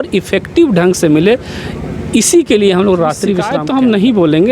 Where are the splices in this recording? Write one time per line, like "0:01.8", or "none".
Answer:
0:03.5